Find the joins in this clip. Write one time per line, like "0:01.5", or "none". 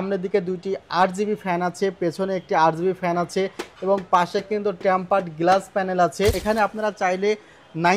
0:06.4